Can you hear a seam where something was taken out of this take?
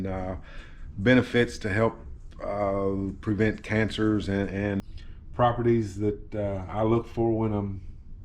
yes; 1 cut; at 4.9 s

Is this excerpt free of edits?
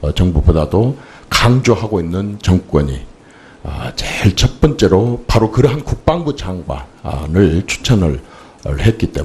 no; 1 cut; at 7.7 s

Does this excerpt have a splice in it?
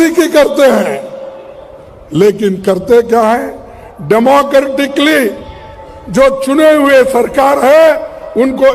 no; 0 cuts

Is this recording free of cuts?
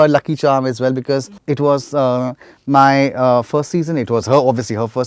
no; 1 cut; at 1.3 s

